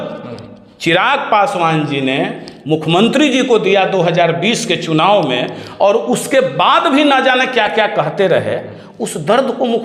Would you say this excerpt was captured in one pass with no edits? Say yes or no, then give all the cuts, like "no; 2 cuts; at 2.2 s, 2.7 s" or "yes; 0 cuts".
yes; 0 cuts